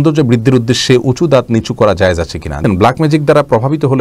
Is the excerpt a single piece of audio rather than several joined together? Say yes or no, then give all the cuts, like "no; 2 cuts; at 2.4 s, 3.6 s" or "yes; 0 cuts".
no; 1 cut; at 2.6 s